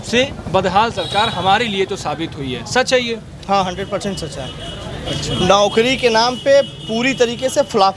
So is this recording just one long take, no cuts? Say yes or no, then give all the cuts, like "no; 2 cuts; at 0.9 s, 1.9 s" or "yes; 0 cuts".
yes; 0 cuts